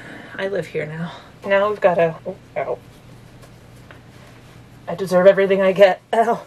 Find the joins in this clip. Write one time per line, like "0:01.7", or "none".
0:01.3
0:02.2